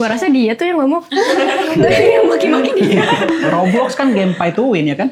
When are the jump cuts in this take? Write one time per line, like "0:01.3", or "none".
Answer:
none